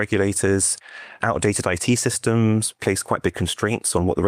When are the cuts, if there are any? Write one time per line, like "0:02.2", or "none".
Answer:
none